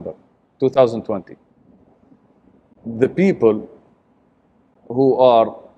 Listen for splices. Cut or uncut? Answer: cut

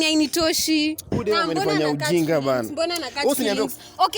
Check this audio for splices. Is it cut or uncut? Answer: cut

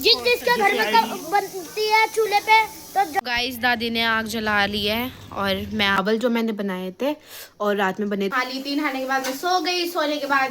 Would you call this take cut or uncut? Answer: cut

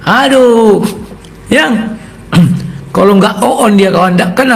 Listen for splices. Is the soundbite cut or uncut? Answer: uncut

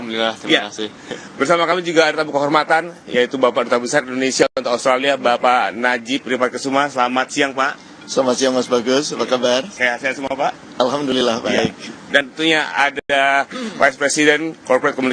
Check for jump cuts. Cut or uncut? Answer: cut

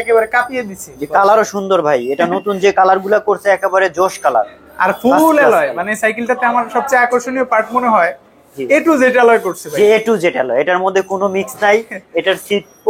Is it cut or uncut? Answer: uncut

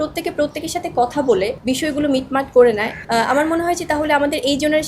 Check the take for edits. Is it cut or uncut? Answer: cut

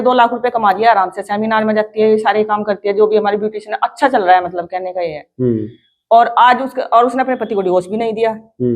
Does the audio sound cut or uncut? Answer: uncut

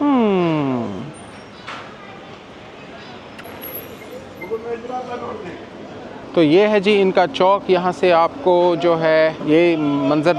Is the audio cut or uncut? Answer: uncut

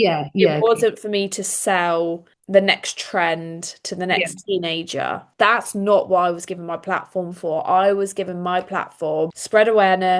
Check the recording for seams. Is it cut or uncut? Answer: uncut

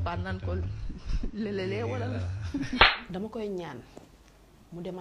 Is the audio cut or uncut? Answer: cut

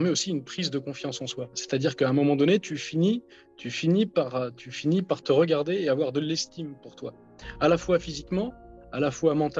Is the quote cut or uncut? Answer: uncut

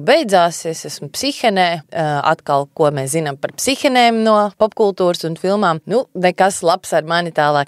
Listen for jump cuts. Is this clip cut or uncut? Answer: cut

